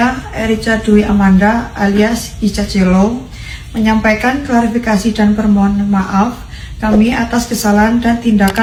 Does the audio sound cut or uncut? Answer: uncut